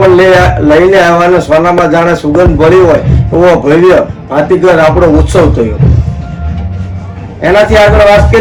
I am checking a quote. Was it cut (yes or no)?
no